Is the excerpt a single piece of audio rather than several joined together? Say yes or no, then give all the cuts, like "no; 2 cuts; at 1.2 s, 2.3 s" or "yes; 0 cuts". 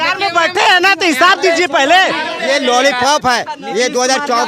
no; 1 cut; at 2.3 s